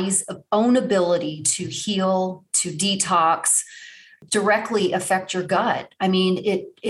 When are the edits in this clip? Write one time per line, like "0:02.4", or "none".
0:04.2